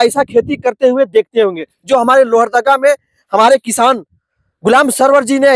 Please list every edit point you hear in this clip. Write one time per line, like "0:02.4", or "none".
none